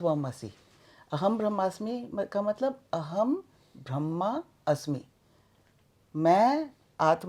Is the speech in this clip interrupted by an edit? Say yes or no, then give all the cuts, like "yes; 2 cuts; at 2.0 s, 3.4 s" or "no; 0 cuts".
no; 0 cuts